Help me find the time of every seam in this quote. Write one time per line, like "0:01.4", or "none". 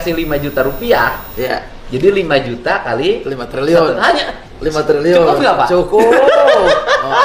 none